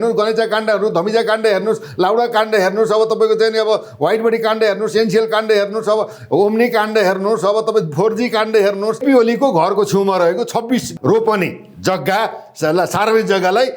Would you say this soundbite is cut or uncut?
cut